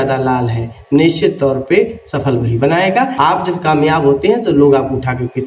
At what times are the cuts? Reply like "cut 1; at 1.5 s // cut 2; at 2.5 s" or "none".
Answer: cut 1; at 3.1 s